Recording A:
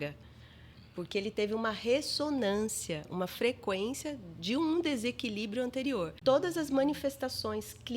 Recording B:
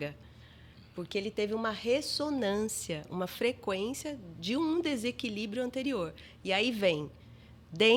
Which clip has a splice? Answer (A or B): A